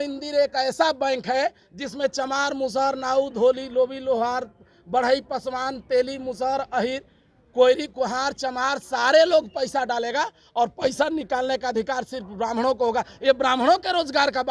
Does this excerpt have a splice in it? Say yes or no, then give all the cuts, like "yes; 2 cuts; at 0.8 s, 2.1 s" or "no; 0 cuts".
no; 0 cuts